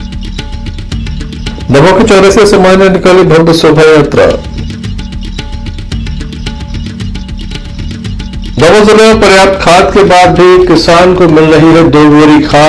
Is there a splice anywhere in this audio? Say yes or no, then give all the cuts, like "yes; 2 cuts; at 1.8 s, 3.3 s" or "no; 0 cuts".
yes; 1 cut; at 7.7 s